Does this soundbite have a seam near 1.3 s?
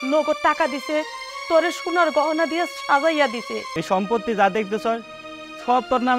no; 1 cut; at 3.7 s

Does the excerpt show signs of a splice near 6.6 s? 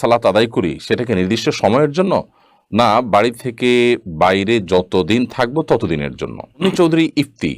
yes; 1 cut; at 6.6 s

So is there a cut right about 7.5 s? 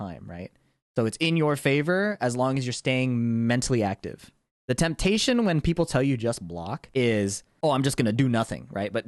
yes; 2 cuts; at 6.8 s, 7.5 s

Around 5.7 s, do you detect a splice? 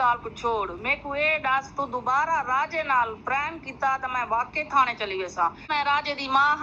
yes; 1 cut; at 5.7 s

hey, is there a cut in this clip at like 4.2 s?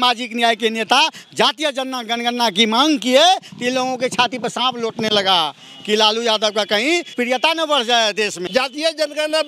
no; 2 cuts; at 7.1 s, 8.4 s

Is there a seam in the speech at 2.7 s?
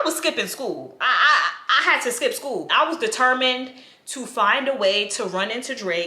yes; 1 cut; at 2.7 s

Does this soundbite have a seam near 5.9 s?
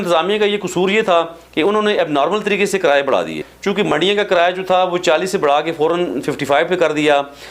no; 1 cut; at 3.5 s

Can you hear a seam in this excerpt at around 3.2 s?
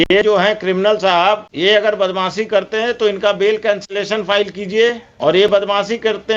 no; 2 cuts; at 1.5 s, 5.1 s

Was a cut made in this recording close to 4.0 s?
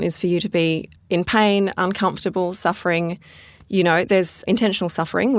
no; 1 cut; at 0.9 s

